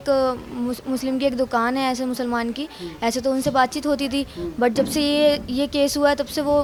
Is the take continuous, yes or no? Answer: yes